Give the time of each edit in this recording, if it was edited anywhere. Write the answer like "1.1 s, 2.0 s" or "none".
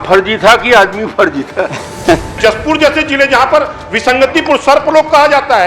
2.4 s

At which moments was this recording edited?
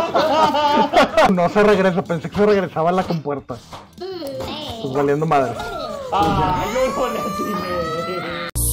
1.3 s

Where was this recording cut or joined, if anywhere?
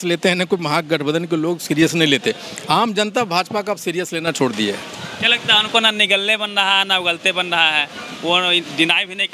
none

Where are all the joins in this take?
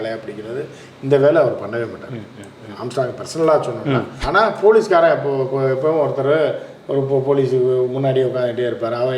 4.2 s

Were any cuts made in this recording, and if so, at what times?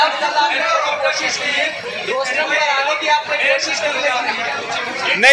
none

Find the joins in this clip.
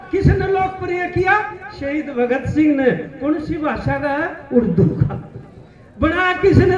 none

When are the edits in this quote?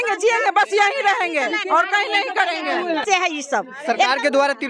3.0 s

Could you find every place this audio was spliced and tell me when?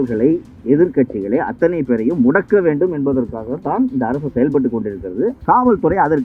none

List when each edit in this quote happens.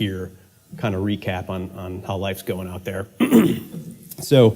1.1 s

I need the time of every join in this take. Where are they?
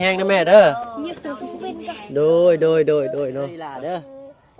3.6 s

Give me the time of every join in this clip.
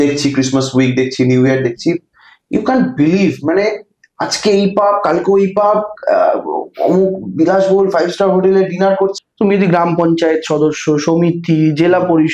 9.1 s

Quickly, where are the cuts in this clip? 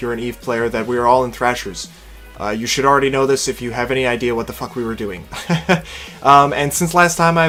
none

